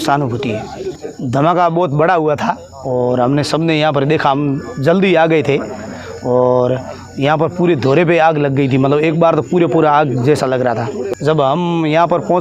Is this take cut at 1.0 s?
yes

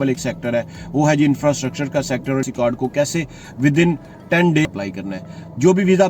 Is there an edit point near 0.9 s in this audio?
no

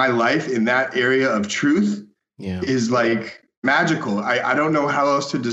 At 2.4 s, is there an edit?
no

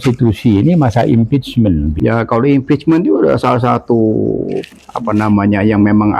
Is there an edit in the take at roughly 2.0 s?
yes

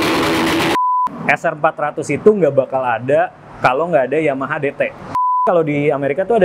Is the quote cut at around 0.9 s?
yes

